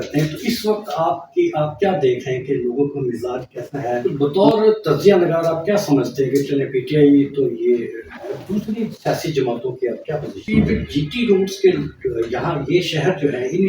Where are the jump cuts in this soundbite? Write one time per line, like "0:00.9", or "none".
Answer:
0:04.0
0:10.4